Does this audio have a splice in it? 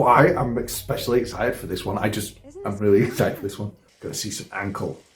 yes; 1 cut; at 3.9 s

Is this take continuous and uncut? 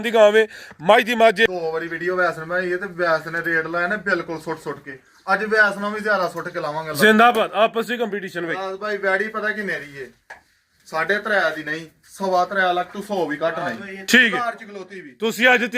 no; 1 cut; at 1.5 s

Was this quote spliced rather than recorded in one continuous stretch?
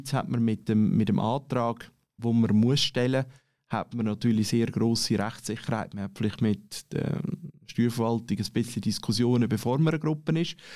yes; 1 cut; at 2.2 s

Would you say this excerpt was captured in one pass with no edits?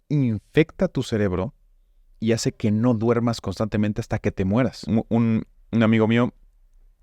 no; 1 cut; at 4.8 s

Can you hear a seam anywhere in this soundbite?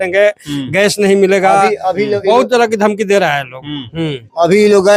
no; 0 cuts

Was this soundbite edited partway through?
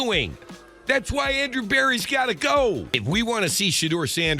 yes; 1 cut; at 2.9 s

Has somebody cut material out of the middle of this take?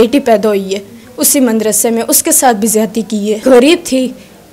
yes; 1 cut; at 3.4 s

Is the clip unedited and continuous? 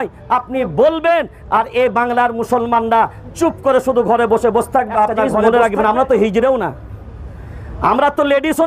no; 1 cut; at 5.4 s

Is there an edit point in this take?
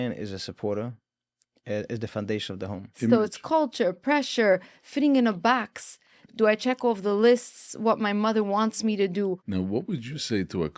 yes; 3 cuts; at 2.9 s, 6.2 s, 9.4 s

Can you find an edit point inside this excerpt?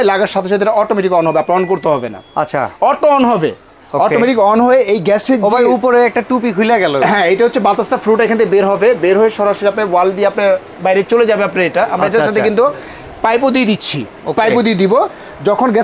no; 0 cuts

